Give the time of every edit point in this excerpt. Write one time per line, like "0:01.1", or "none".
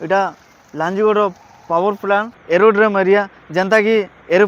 0:02.3